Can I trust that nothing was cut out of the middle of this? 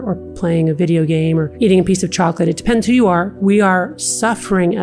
no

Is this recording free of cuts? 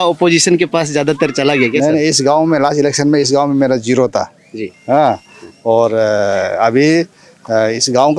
yes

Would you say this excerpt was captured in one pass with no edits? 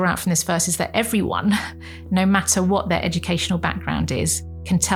yes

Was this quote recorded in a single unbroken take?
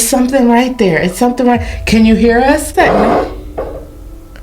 no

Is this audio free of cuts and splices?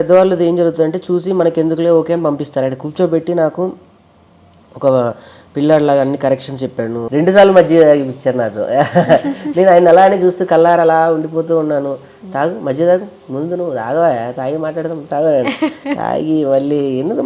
no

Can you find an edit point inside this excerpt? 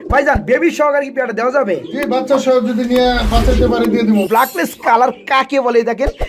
yes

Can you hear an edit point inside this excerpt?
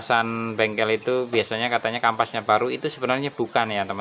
no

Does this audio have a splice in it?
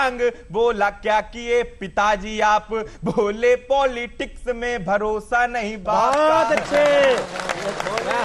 no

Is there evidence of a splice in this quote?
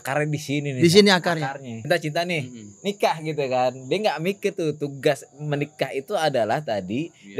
yes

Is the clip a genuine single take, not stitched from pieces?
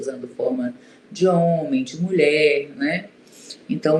yes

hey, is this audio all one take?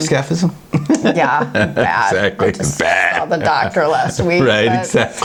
yes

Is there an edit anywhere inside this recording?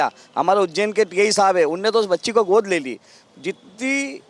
no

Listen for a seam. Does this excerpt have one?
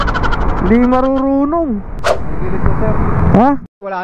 no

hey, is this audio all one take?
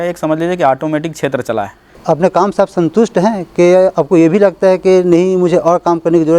no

